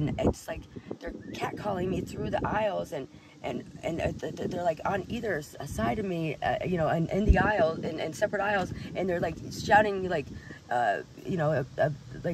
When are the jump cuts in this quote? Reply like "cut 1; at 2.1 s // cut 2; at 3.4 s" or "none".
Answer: none